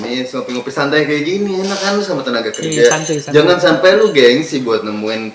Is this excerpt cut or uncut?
uncut